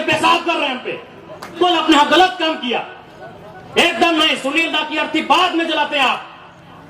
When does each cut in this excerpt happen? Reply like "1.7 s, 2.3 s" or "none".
1.6 s